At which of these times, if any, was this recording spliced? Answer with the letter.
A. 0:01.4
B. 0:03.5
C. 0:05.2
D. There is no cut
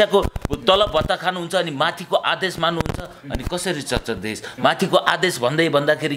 D